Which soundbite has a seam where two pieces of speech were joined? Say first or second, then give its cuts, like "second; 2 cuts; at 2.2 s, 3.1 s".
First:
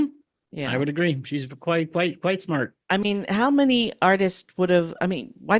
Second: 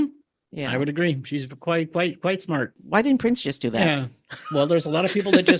second; 1 cut; at 2.8 s